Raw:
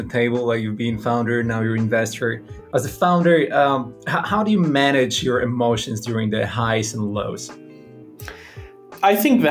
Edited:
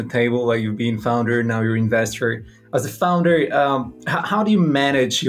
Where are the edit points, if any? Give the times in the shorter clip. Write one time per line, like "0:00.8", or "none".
none